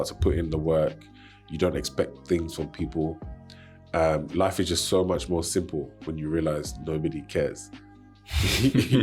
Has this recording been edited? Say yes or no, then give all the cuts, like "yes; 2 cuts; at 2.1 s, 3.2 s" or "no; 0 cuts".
no; 0 cuts